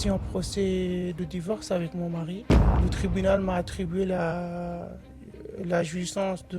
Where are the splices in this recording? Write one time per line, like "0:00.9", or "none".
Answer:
0:02.5